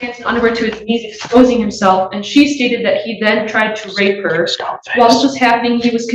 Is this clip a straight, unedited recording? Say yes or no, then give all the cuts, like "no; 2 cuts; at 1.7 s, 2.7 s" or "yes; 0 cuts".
yes; 0 cuts